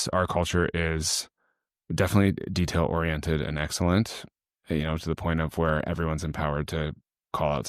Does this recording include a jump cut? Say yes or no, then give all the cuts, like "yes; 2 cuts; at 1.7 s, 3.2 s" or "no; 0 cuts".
no; 0 cuts